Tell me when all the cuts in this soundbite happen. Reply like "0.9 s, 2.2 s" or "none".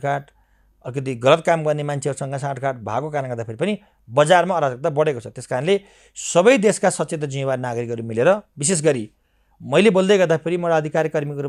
none